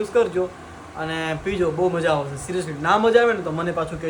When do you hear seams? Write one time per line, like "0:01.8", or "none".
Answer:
none